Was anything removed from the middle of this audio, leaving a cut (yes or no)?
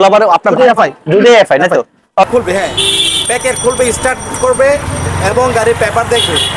yes